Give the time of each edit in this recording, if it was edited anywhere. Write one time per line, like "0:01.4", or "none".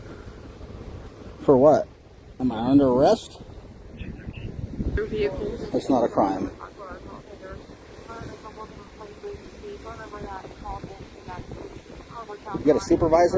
0:05.0